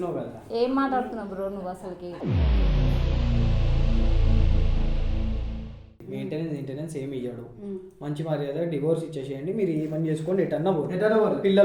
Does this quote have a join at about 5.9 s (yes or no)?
yes